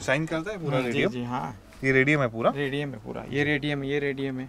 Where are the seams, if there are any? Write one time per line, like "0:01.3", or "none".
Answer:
none